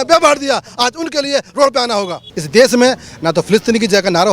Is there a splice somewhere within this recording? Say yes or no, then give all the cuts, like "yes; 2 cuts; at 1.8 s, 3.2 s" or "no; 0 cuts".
yes; 1 cut; at 2.2 s